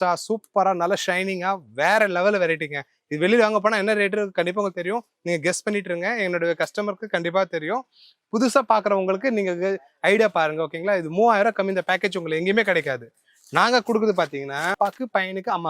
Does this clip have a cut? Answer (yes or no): yes